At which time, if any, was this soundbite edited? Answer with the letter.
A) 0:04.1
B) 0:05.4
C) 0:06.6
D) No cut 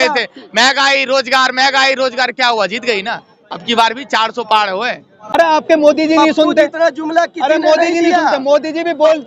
B